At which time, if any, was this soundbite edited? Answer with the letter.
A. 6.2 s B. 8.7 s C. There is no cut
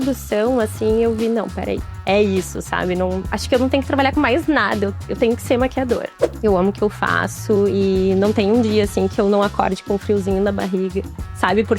A